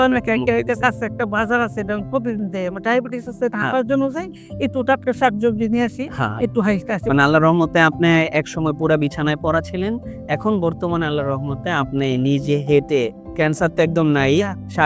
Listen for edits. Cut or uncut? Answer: uncut